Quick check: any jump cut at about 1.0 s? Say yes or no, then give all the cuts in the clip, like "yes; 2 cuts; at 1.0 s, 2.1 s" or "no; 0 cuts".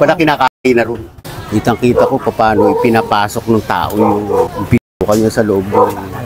yes; 1 cut; at 1.0 s